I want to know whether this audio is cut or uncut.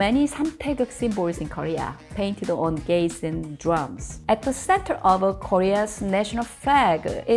uncut